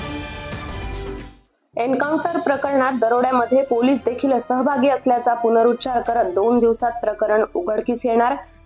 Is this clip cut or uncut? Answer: cut